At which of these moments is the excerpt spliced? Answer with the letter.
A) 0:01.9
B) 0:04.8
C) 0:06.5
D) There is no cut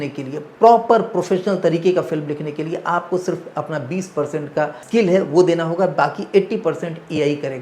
B